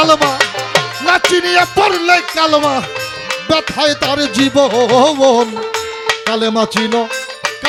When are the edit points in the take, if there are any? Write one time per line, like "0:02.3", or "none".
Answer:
none